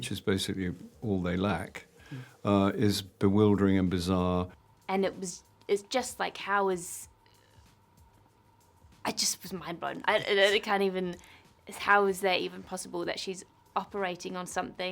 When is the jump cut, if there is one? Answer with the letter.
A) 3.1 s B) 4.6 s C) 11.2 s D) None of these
B